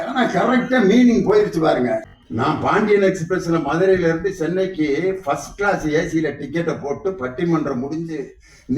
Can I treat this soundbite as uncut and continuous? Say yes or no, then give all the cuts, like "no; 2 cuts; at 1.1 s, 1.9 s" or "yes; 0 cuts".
no; 1 cut; at 2.1 s